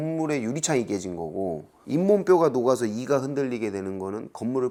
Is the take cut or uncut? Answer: uncut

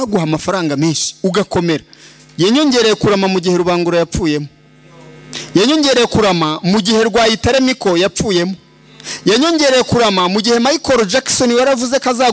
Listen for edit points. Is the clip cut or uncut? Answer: uncut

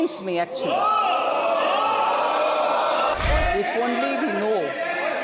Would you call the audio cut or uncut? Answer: cut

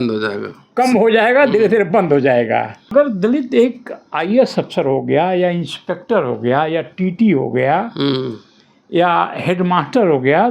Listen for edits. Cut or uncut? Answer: cut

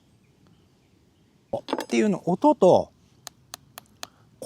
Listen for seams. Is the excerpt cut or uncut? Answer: cut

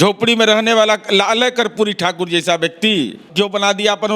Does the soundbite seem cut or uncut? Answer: cut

